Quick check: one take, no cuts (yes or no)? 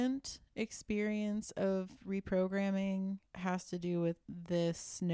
no